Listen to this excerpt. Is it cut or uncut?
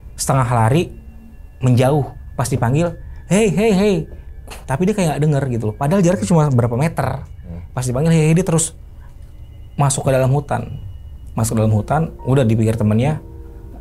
uncut